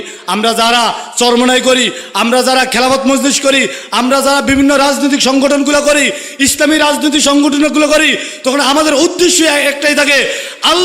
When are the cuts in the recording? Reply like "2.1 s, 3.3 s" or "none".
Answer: none